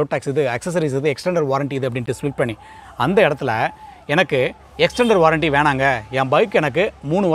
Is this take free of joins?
yes; 0 cuts

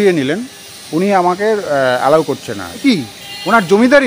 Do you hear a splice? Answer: yes; 1 cut; at 2.8 s

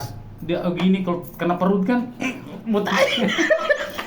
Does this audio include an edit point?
no; 0 cuts

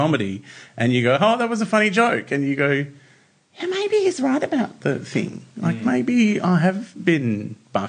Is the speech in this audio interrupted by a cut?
no; 0 cuts

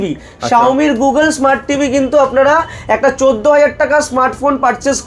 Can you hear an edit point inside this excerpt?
no; 0 cuts

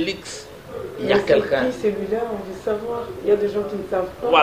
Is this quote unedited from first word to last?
yes; 0 cuts

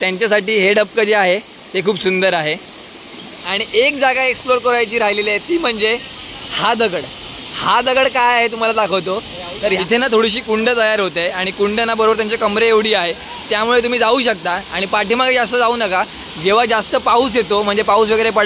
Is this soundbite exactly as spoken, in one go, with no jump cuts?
no; 2 cuts; at 3.4 s, 9.8 s

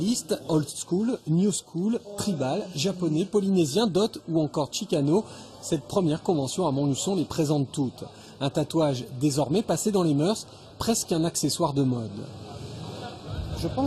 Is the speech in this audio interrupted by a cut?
yes; 1 cut; at 8.1 s

